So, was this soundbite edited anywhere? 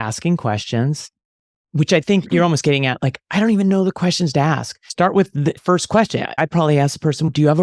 no; 0 cuts

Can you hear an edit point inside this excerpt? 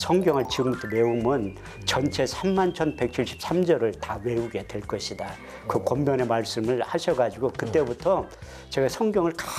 no; 0 cuts

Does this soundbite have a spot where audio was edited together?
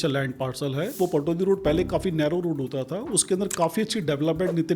yes; 1 cut; at 0.9 s

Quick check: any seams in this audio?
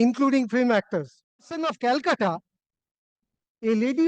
yes; 1 cut; at 1.6 s

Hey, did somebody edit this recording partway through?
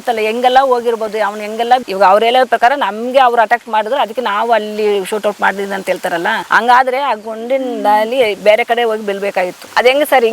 yes; 1 cut; at 1.9 s

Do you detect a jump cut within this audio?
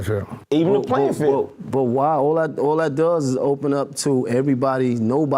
yes; 1 cut; at 1.6 s

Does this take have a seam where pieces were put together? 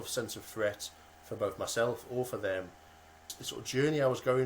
yes; 1 cut; at 3.3 s

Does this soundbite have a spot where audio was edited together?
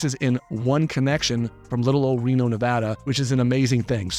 no; 0 cuts

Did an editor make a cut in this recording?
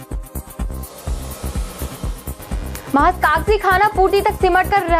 yes; 1 cut; at 2.1 s

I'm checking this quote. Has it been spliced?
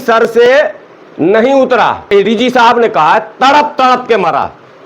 yes; 1 cut; at 2.1 s

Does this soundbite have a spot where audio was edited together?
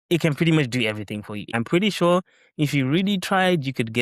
yes; 1 cut; at 1.5 s

